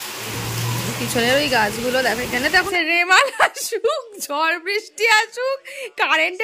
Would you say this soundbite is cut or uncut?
cut